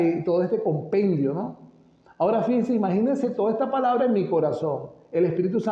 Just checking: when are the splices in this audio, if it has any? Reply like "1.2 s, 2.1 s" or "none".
none